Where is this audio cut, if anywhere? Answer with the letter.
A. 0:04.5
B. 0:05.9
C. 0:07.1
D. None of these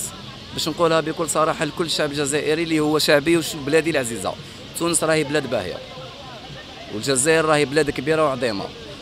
D